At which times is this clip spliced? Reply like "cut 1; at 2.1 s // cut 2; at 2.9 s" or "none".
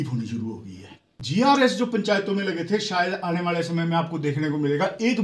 cut 1; at 1.4 s

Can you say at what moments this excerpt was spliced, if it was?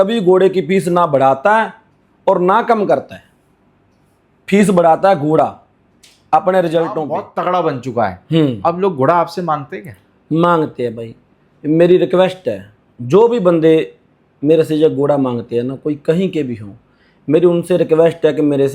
cut 1; at 7.2 s

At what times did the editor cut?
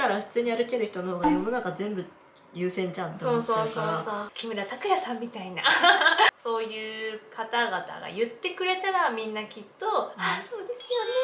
cut 1; at 4.3 s // cut 2; at 6.3 s

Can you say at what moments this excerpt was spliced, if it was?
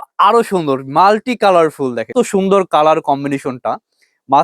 cut 1; at 2.0 s

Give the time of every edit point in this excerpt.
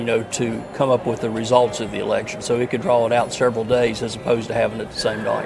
none

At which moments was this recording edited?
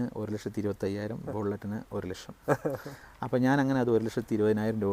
none

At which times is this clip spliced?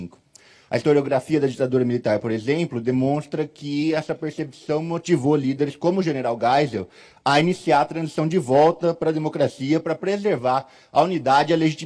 none

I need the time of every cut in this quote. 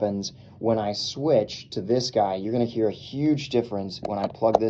none

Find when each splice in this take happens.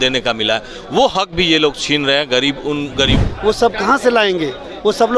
cut 1; at 3.2 s

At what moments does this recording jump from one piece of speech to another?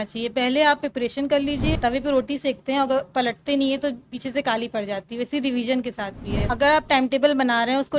cut 1; at 1.8 s // cut 2; at 6.5 s

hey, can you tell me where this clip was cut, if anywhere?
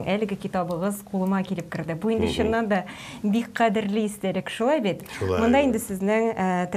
none

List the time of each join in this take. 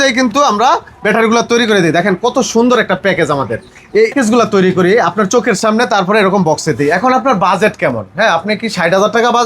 cut 1; at 4.1 s

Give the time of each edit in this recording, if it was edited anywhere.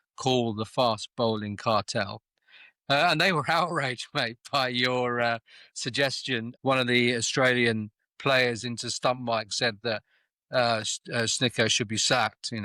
cut 1; at 6.5 s

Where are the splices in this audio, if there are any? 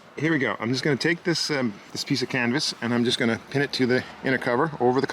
cut 1; at 1.9 s

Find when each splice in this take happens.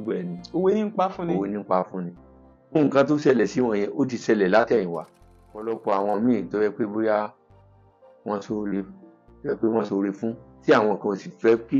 cut 1; at 5.7 s

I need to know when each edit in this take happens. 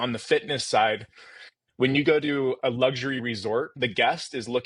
cut 1; at 2.6 s // cut 2; at 3.7 s

